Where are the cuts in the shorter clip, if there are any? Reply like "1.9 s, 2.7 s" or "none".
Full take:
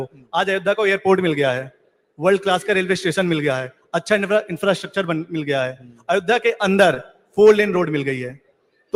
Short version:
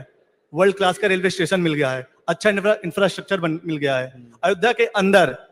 none